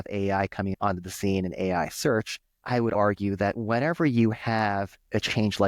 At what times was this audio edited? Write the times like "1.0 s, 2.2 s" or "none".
0.7 s, 2.7 s